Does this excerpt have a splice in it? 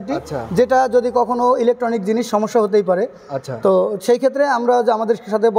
no; 0 cuts

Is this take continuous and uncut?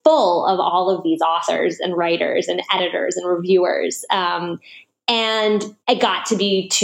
no; 1 cut; at 5.7 s

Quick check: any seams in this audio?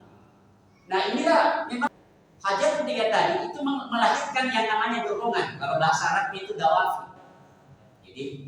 yes; 1 cut; at 1.9 s

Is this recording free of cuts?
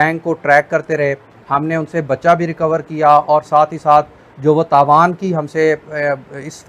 no; 1 cut; at 1.3 s

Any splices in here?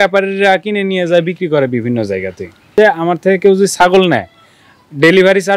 yes; 1 cut; at 2.7 s

